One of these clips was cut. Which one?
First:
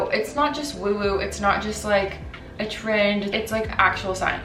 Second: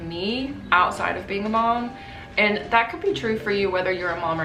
first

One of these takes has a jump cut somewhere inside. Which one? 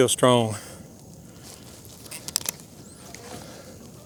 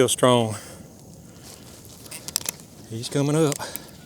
second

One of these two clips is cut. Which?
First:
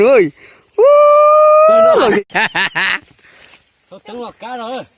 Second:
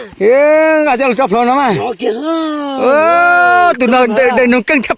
first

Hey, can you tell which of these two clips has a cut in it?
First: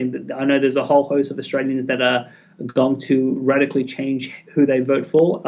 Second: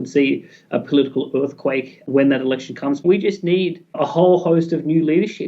second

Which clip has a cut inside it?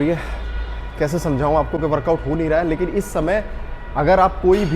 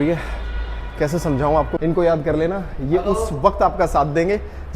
second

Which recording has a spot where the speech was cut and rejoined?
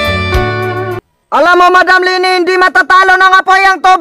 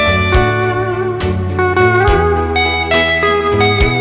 second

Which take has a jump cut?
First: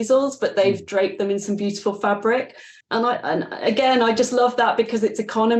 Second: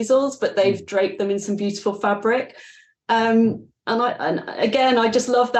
first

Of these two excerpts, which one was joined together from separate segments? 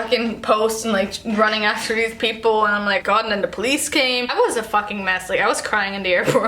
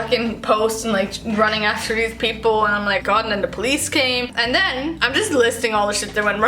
first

